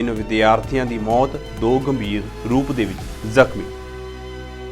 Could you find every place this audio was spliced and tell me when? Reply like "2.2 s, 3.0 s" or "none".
3.6 s